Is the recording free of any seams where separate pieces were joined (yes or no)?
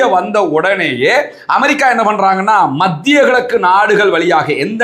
yes